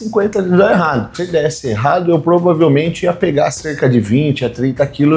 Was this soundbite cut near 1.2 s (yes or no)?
yes